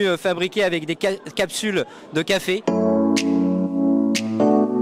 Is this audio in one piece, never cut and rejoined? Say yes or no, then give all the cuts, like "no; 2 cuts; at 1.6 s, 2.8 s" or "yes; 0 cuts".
no; 1 cut; at 2.7 s